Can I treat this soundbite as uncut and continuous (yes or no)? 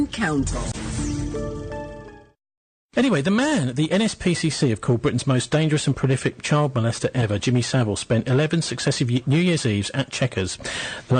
yes